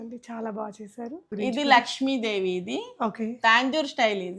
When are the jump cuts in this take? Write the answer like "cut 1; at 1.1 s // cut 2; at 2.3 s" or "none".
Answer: cut 1; at 1.3 s